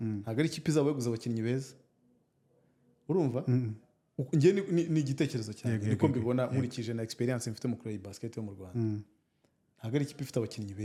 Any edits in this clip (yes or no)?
no